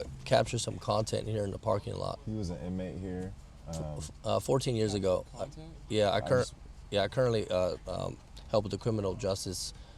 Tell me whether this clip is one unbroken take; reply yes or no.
yes